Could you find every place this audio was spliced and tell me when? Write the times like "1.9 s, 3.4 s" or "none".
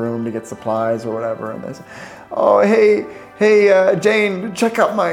none